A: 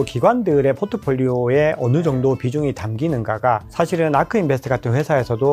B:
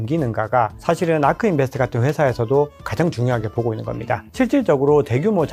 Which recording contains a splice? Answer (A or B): B